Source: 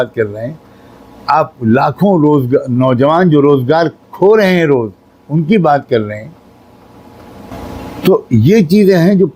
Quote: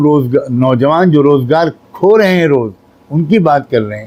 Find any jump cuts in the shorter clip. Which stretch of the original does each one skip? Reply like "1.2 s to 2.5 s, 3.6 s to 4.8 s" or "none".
none